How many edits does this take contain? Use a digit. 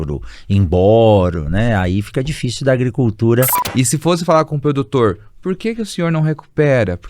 1